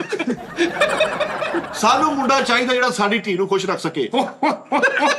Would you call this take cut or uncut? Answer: cut